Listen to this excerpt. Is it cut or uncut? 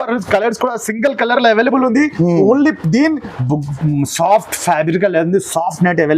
cut